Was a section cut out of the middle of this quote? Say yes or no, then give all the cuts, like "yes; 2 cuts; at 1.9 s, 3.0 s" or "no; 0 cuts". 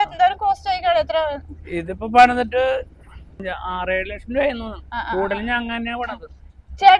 yes; 1 cut; at 3.4 s